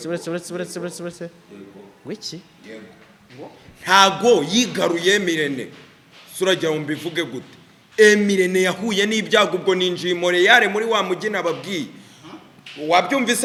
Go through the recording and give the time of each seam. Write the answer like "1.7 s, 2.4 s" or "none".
none